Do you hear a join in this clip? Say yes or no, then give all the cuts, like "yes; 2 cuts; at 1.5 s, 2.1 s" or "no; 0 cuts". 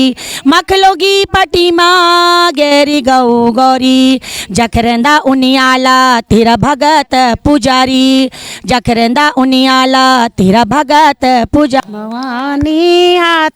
yes; 1 cut; at 11.8 s